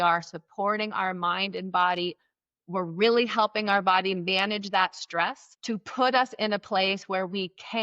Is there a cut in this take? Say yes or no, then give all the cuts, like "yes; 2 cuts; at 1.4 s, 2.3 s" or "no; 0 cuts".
yes; 1 cut; at 5.5 s